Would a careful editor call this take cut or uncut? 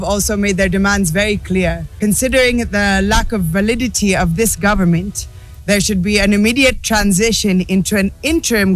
cut